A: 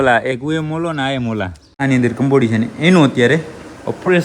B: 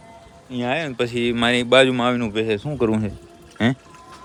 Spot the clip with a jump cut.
A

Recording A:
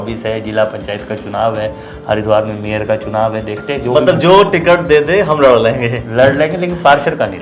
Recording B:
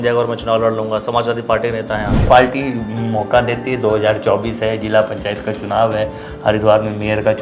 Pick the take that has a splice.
B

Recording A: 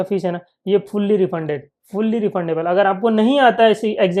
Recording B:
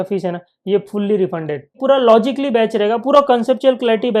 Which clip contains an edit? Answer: B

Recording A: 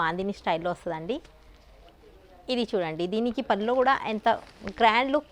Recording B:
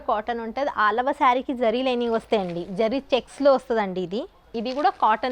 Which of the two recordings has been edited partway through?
B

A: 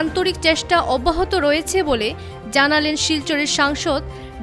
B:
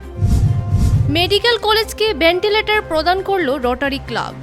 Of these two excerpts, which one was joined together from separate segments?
B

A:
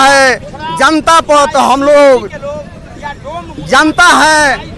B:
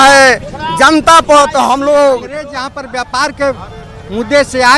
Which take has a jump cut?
B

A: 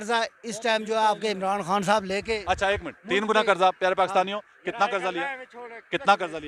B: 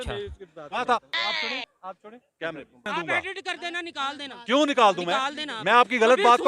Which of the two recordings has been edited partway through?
B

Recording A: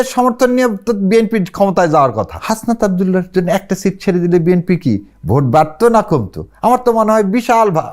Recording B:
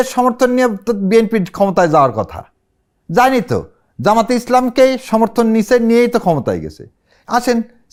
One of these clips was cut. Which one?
A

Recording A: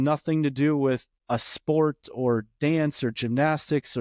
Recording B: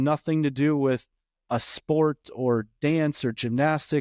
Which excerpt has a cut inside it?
A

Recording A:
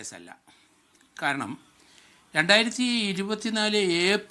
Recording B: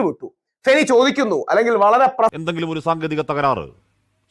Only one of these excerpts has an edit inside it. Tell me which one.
B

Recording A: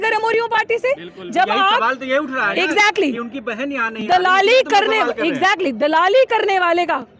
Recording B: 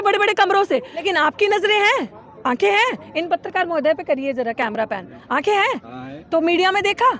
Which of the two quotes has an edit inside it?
B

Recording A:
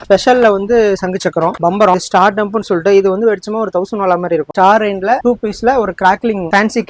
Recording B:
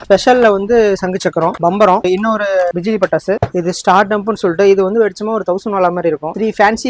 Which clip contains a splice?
A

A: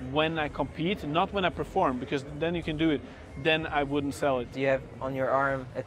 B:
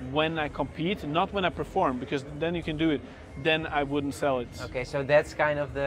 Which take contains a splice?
A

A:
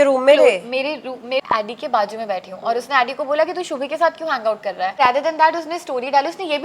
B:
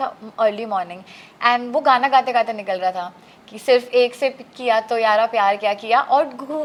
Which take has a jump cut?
A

